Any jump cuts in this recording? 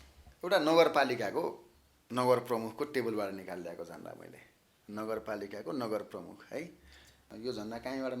yes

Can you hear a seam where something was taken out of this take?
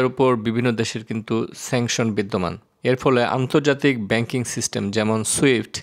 no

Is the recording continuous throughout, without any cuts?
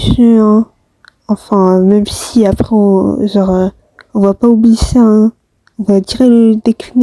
yes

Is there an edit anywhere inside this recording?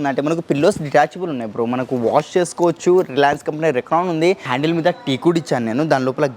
yes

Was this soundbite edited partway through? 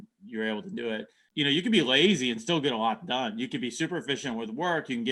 yes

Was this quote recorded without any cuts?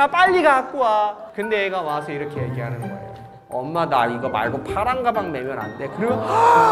yes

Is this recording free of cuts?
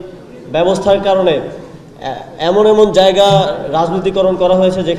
yes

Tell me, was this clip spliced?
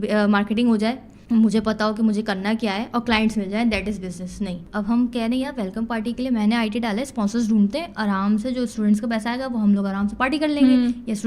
yes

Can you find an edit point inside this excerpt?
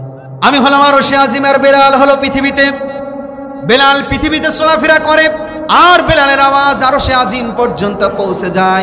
no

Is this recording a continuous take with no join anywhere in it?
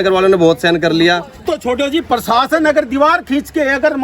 no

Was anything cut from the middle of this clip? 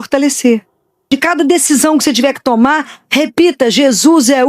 yes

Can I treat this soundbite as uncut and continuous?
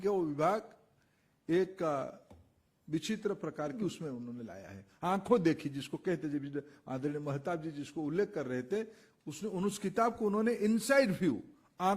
no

